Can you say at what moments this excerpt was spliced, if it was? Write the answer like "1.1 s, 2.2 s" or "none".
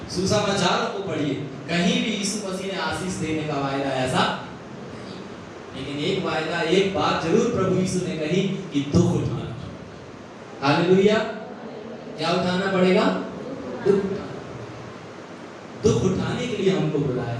none